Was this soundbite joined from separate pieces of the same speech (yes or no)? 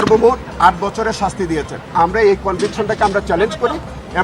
yes